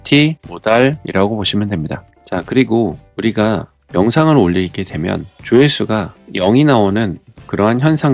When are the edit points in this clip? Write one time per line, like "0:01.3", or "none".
0:01.0
0:02.1